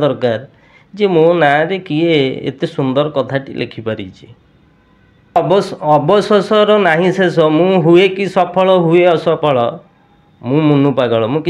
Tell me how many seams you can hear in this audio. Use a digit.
1